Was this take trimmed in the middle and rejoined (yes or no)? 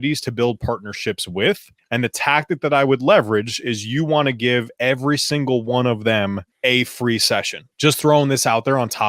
yes